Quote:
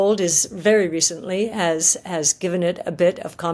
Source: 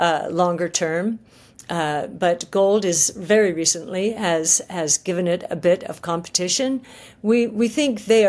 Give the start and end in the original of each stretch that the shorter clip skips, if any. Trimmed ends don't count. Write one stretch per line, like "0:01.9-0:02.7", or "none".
none